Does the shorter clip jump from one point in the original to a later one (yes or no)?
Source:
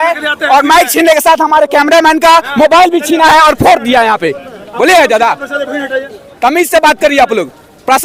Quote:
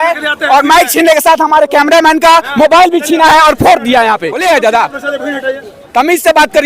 yes